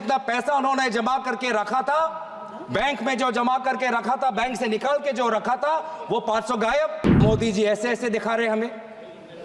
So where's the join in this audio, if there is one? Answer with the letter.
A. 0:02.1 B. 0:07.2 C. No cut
B